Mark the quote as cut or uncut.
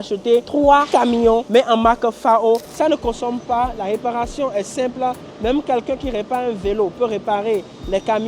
cut